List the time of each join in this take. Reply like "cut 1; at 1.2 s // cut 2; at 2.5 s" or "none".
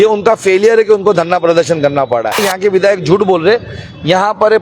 cut 1; at 2.5 s